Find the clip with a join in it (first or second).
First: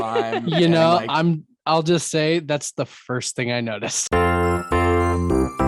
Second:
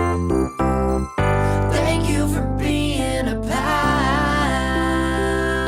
first